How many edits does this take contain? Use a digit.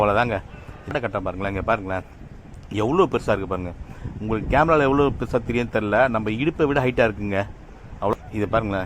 2